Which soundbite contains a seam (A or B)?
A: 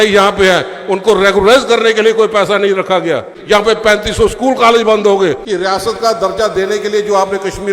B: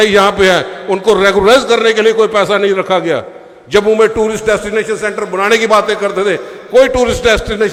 A